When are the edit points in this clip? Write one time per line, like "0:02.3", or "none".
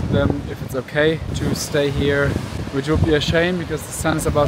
0:01.3
0:02.6